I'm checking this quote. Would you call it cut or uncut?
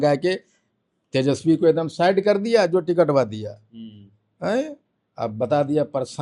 uncut